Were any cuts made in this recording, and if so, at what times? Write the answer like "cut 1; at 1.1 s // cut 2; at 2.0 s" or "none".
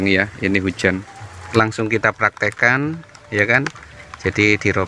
cut 1; at 1.4 s